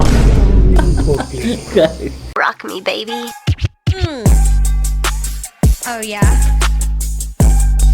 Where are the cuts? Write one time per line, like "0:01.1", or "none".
0:02.2